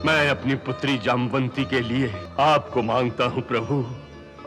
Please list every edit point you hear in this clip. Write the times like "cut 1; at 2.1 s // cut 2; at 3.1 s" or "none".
cut 1; at 2.2 s